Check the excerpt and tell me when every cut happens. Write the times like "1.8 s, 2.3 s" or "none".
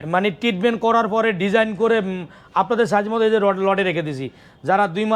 none